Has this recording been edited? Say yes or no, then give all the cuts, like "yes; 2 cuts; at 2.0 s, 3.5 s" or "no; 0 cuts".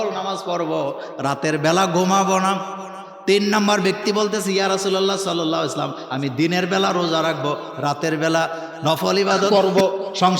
yes; 1 cut; at 9.5 s